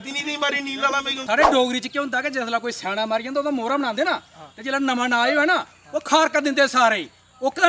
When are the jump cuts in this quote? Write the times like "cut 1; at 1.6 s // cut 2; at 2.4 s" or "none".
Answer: cut 1; at 1.2 s